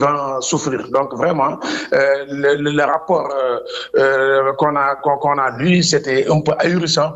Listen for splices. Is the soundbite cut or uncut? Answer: uncut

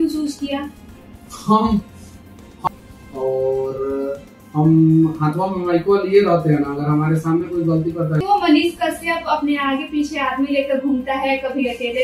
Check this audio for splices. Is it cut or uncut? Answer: cut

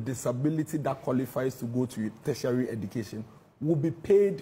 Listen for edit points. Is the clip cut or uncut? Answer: uncut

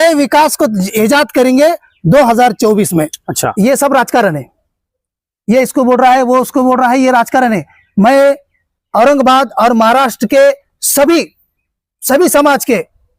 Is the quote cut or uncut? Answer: cut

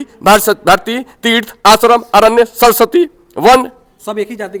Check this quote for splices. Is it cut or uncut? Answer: uncut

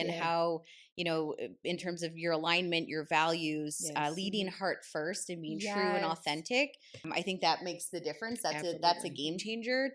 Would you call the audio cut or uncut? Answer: cut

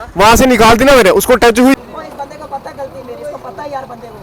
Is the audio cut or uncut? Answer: cut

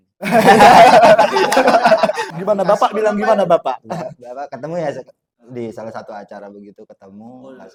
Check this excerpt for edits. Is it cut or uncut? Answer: uncut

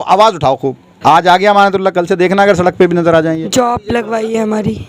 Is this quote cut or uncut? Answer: cut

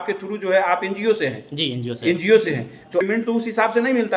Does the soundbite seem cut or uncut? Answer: cut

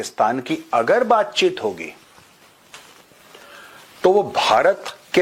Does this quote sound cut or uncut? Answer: uncut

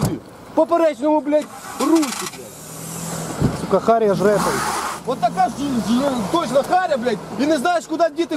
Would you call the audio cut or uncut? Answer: uncut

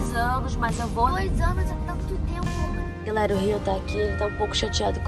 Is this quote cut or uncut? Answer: cut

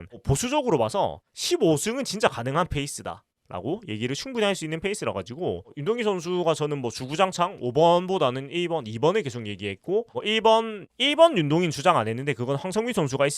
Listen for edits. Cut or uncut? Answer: cut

